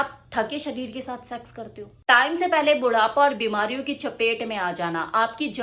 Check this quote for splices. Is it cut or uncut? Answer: cut